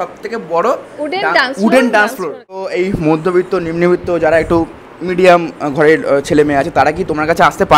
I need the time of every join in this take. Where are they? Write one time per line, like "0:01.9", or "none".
0:02.7